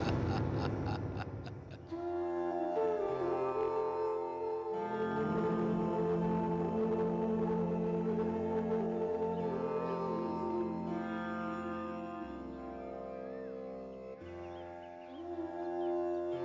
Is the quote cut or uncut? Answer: uncut